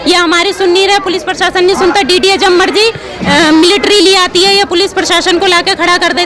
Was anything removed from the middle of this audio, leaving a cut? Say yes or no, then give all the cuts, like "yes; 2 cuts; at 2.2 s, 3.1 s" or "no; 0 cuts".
no; 0 cuts